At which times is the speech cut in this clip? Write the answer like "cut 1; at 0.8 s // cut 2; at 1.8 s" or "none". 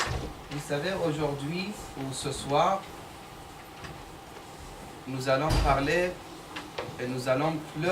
cut 1; at 3.0 s

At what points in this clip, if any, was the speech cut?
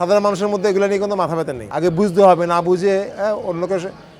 cut 1; at 1.6 s

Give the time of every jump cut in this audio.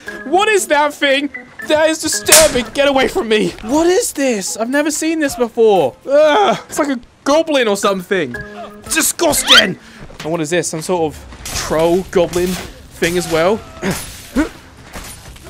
none

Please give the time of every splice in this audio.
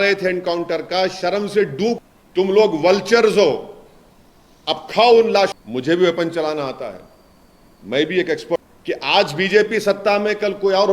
cut 1; at 2.0 s // cut 2; at 5.5 s // cut 3; at 8.6 s

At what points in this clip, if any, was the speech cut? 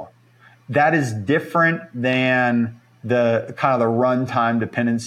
none

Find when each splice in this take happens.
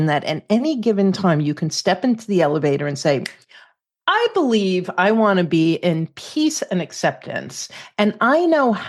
none

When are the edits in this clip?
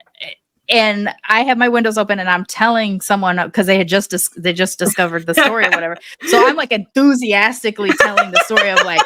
none

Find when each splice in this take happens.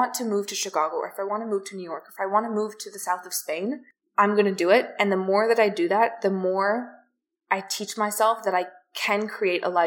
none

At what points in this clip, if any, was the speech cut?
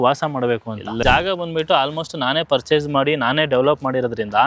cut 1; at 1.0 s

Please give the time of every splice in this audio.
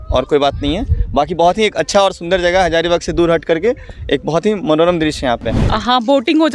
cut 1; at 5.6 s

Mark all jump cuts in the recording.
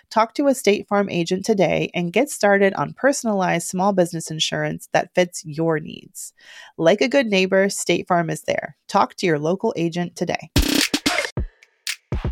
cut 1; at 11.3 s

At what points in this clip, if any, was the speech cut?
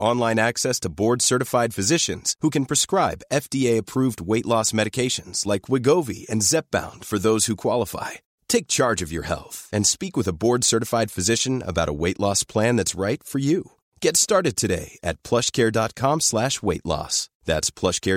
none

